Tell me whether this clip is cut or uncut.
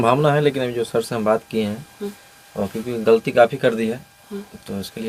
uncut